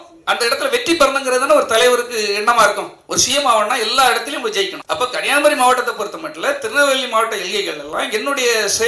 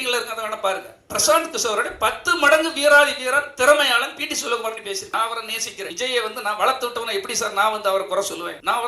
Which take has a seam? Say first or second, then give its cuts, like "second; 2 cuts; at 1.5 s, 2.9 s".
second; 1 cut; at 5.1 s